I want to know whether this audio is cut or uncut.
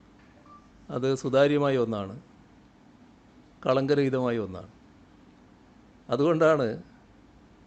uncut